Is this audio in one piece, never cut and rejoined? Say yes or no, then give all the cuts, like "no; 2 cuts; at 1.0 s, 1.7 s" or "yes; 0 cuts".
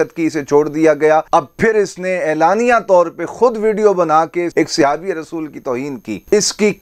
no; 2 cuts; at 1.3 s, 4.5 s